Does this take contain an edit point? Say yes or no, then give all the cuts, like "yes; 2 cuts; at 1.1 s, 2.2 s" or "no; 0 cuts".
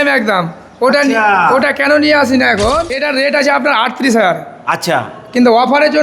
yes; 1 cut; at 3.0 s